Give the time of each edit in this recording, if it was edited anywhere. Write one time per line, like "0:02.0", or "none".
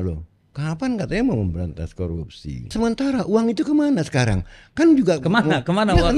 0:02.7